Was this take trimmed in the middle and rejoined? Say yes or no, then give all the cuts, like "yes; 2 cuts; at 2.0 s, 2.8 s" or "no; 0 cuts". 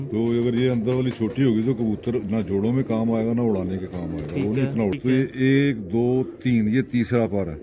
yes; 1 cut; at 5.0 s